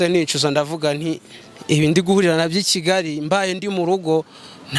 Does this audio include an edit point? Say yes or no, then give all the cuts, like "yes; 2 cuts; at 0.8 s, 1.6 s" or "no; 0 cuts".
no; 0 cuts